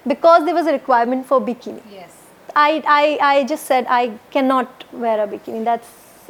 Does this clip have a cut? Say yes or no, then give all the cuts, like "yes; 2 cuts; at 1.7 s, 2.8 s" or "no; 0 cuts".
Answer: no; 0 cuts